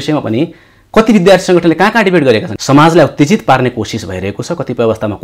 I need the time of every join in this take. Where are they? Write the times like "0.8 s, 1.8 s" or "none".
2.5 s

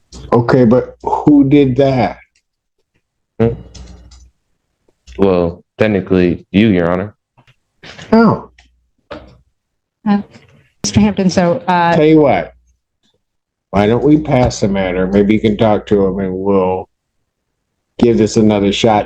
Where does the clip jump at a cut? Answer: none

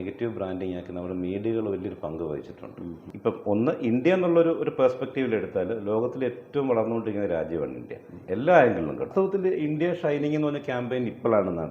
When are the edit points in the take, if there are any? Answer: 3.2 s, 9.2 s

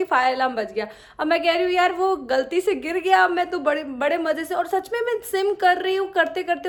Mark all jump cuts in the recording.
none

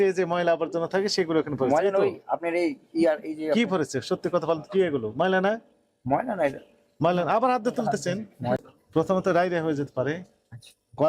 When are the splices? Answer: 8.6 s

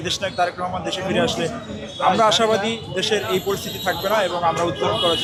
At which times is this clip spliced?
none

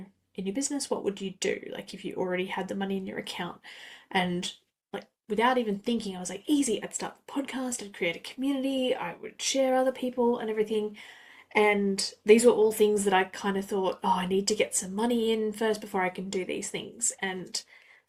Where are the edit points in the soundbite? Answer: none

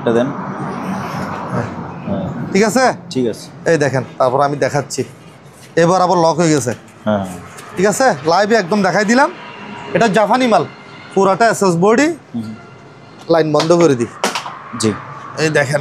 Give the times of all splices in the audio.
none

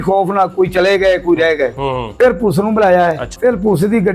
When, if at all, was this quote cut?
2.1 s, 3.3 s

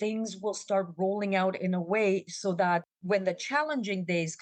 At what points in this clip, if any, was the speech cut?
none

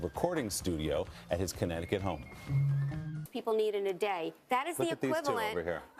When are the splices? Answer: 3.4 s

